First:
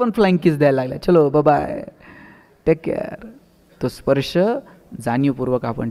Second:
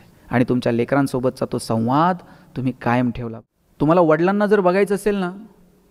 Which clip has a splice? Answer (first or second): second